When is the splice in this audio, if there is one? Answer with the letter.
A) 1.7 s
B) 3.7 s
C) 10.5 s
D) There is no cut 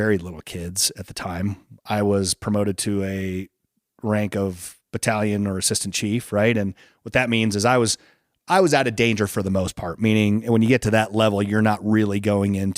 A